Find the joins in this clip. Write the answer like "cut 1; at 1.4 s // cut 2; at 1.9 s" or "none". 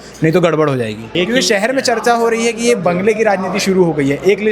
cut 1; at 1.1 s